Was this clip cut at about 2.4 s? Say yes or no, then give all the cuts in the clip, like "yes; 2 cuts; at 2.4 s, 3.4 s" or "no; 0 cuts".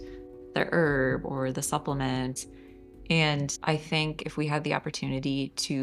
yes; 2 cuts; at 2.4 s, 3.6 s